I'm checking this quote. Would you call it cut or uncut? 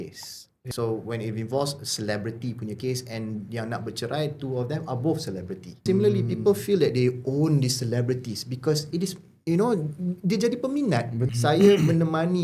cut